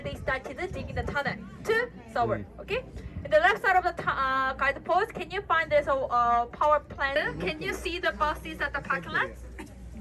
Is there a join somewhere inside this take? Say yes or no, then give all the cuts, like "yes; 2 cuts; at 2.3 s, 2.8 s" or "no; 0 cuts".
yes; 1 cut; at 7.2 s